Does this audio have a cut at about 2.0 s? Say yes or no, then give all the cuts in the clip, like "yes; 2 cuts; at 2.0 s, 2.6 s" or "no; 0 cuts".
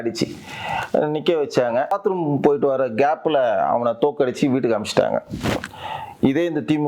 yes; 1 cut; at 2.0 s